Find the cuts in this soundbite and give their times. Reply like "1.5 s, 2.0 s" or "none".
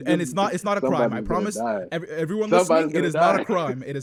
none